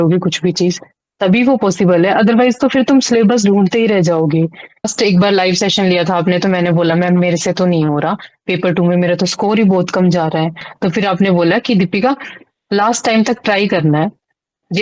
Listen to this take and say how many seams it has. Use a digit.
2